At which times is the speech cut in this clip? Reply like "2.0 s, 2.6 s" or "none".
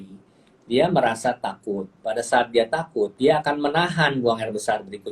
1.9 s, 3.1 s